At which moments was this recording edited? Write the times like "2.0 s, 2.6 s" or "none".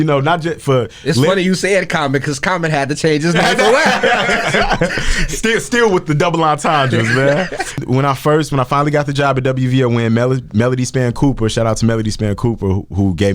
7.8 s